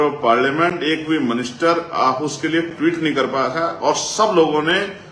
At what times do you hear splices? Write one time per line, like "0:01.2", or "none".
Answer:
none